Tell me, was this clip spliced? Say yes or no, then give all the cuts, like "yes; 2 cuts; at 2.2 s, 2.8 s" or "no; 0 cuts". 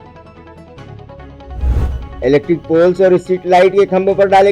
yes; 1 cut; at 1.7 s